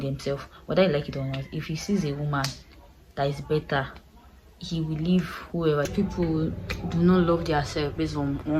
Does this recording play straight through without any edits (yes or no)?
no